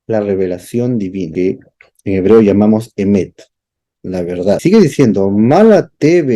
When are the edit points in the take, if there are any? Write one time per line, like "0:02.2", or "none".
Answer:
0:01.3
0:04.6